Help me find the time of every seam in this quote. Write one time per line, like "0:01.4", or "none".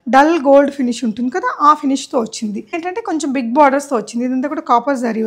0:02.8